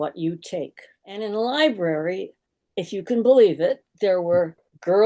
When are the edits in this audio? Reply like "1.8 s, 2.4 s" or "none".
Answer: 1.2 s